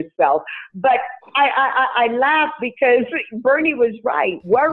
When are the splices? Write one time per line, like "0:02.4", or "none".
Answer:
none